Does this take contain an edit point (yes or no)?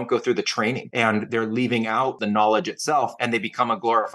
yes